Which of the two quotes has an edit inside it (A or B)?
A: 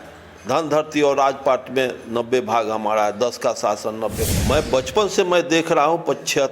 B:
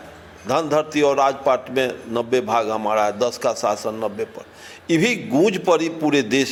A